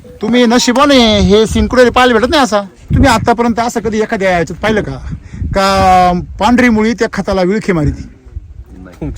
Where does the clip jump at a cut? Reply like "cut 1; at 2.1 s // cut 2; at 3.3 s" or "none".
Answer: cut 1; at 2.9 s